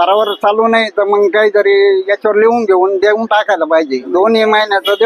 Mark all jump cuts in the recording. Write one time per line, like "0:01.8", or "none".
0:04.1

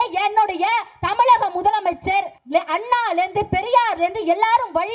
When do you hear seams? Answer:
0:02.4

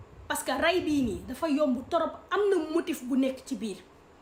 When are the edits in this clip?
none

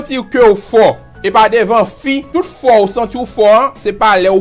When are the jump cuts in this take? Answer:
0:02.2

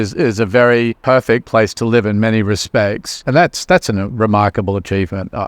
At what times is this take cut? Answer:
0:01.0
0:03.2

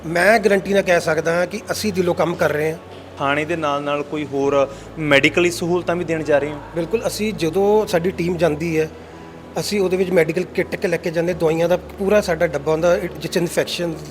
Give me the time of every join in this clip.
0:03.1

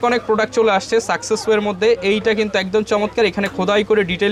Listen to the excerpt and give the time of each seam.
none

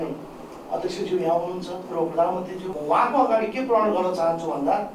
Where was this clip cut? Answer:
0:02.7

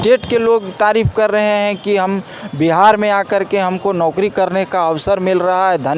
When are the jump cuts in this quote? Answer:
none

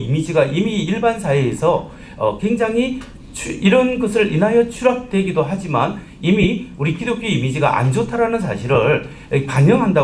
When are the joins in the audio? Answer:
none

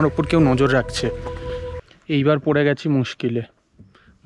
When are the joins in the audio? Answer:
0:01.7

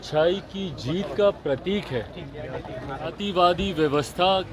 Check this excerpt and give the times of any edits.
0:03.2

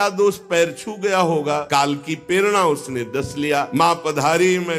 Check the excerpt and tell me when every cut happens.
0:01.6
0:03.7

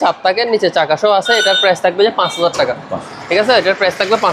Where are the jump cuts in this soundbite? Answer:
none

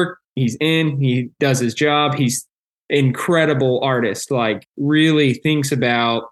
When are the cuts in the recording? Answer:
none

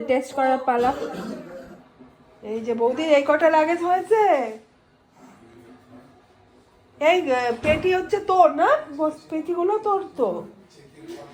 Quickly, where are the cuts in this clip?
none

